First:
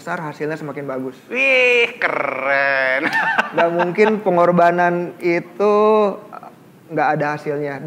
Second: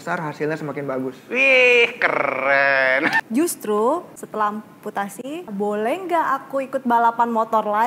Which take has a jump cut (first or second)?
second